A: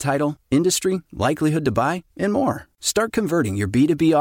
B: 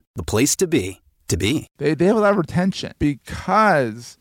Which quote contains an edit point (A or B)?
B